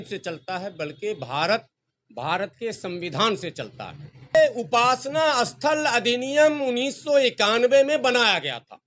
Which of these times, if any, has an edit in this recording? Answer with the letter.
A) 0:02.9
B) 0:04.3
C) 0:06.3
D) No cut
B